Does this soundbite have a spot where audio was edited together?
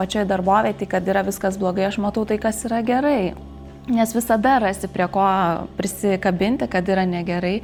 no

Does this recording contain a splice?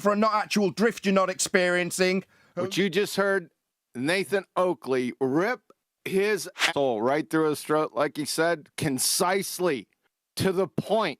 yes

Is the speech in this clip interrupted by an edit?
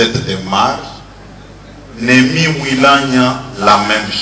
no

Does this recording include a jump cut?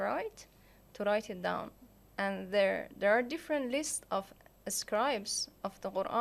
no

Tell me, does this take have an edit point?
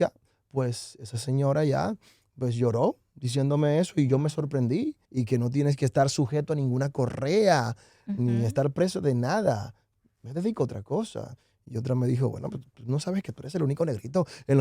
yes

